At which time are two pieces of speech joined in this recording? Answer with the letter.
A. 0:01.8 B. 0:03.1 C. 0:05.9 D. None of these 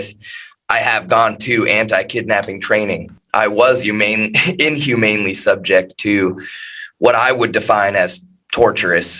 B